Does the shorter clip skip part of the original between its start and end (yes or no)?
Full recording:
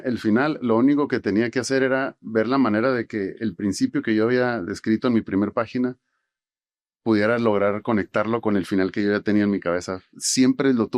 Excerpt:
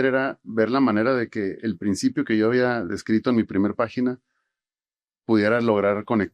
no